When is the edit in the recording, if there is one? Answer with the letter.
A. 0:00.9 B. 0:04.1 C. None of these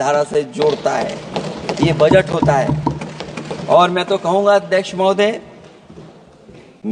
C